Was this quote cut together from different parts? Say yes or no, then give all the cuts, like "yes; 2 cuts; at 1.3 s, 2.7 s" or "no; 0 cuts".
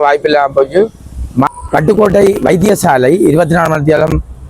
yes; 1 cut; at 1.5 s